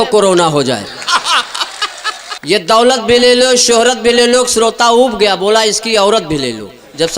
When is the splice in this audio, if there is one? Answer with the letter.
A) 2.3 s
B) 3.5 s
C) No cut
A